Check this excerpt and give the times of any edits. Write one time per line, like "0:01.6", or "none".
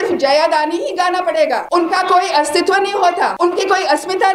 0:01.6
0:03.3

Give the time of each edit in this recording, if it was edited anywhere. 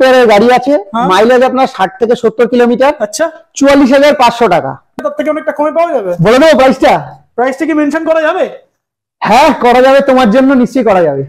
0:05.0

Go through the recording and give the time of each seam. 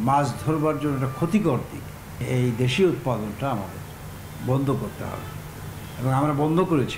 none

